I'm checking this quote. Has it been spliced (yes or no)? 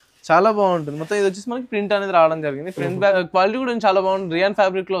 yes